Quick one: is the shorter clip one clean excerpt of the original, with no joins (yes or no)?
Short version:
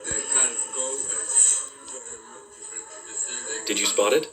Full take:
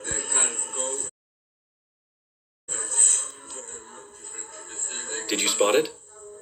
no